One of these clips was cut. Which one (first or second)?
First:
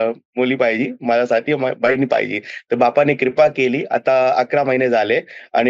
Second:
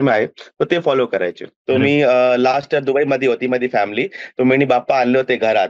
second